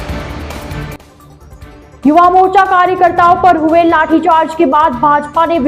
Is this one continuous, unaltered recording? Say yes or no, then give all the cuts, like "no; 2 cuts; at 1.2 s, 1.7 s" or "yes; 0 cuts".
no; 1 cut; at 1.1 s